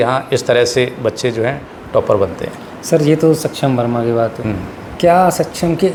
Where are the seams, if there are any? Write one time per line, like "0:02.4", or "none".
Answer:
none